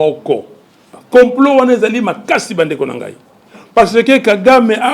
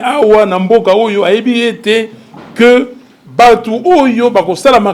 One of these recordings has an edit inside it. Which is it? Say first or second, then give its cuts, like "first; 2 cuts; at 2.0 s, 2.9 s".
first; 1 cut; at 0.9 s